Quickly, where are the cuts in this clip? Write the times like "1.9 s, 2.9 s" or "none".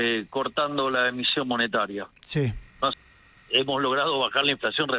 2.9 s